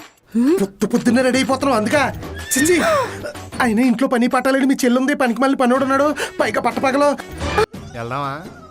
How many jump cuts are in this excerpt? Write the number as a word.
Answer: one